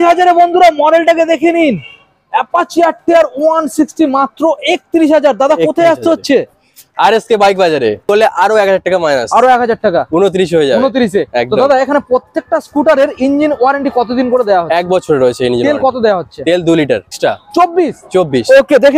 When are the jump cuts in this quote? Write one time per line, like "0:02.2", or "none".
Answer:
0:08.1
0:17.1